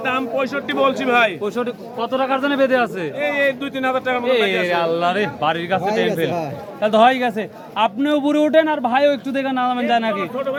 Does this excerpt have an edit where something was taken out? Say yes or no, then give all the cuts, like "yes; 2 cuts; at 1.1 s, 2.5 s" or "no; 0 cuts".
no; 0 cuts